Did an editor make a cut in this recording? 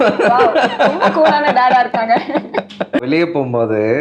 yes; 1 cut; at 3.0 s

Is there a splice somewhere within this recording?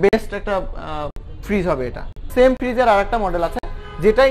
yes; 1 cut; at 2.2 s

